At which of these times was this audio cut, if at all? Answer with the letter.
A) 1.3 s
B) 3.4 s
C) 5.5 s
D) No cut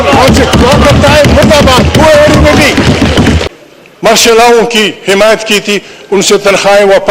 B